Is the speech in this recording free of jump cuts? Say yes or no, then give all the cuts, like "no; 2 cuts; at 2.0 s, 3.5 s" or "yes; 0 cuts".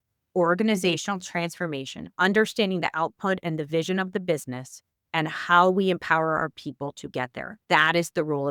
yes; 0 cuts